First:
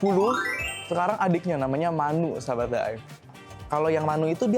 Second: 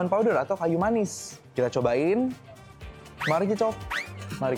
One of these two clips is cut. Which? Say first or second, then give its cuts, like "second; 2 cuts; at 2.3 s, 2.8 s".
first; 1 cut; at 3.1 s